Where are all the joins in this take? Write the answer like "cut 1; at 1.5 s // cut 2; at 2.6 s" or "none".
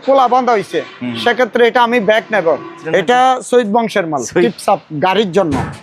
cut 1; at 2.8 s // cut 2; at 4.4 s